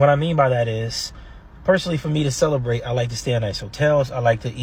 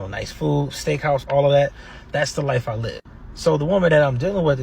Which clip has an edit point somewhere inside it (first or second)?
second